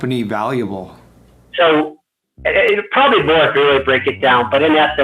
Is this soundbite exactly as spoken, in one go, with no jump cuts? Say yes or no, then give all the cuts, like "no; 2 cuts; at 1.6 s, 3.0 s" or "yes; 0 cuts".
no; 1 cut; at 1.1 s